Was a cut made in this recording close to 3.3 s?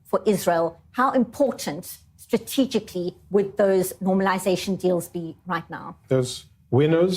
no; 1 cut; at 5.9 s

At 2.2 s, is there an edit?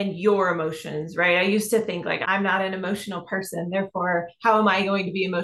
yes; 1 cut; at 2.2 s

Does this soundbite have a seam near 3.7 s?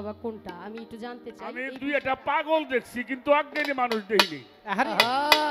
no; 1 cut; at 1.6 s

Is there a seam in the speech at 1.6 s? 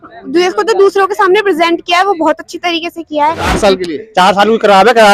no; 1 cut; at 3.5 s

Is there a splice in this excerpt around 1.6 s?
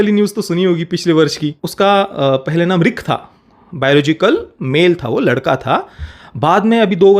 yes; 1 cut; at 1.6 s

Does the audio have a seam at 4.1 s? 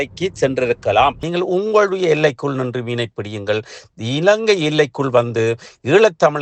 no; 1 cut; at 1.2 s

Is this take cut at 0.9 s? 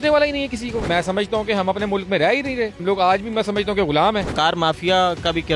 yes; 3 cuts; at 0.9 s, 2.8 s, 4.3 s

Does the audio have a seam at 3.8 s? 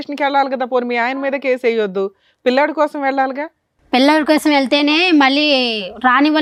no; 0 cuts

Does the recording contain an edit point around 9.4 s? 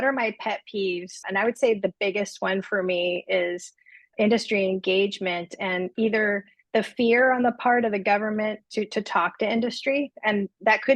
no; 1 cut; at 1.2 s

